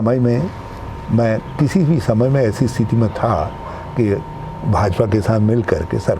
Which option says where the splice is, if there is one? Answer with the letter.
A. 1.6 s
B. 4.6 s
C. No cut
C